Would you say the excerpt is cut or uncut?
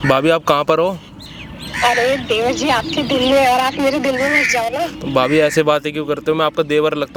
uncut